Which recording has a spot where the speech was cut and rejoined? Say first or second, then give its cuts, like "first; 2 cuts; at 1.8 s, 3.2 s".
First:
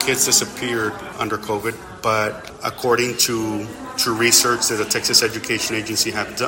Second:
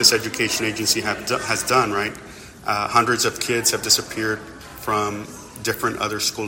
first; 2 cuts; at 1.1 s, 2.5 s